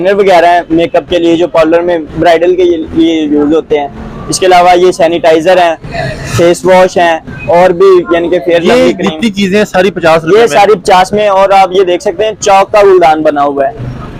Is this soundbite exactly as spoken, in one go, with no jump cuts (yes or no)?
yes